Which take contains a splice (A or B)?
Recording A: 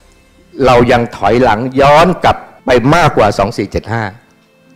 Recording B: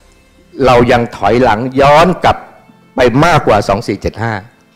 A